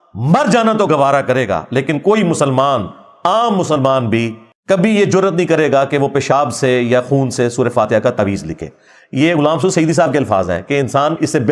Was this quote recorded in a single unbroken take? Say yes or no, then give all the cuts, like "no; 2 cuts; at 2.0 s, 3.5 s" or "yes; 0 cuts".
yes; 0 cuts